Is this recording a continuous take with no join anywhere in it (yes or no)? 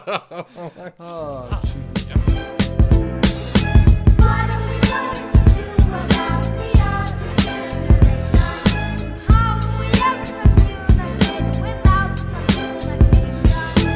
no